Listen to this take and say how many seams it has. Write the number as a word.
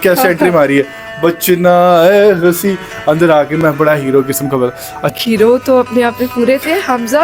one